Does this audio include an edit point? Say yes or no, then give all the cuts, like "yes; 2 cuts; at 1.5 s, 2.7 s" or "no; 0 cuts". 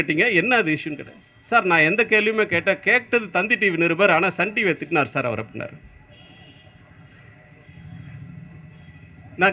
no; 0 cuts